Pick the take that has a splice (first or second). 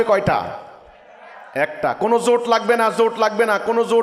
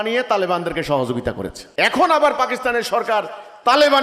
second